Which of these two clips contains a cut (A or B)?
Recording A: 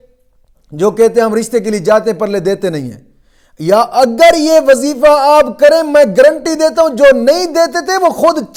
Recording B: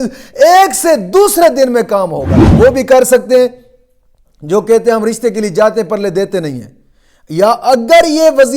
B